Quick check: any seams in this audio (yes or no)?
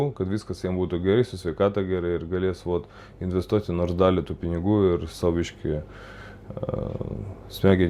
no